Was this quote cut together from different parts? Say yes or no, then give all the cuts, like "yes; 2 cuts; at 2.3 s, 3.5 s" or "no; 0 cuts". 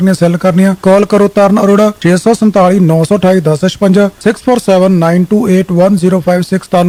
no; 0 cuts